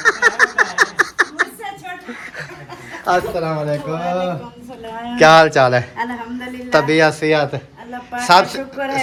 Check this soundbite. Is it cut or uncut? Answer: uncut